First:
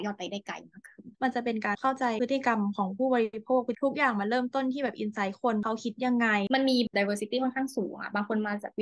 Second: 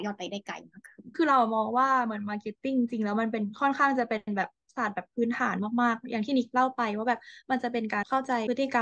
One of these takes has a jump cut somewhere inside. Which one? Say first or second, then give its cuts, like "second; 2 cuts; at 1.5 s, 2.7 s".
first; 2 cuts; at 1.0 s, 6.5 s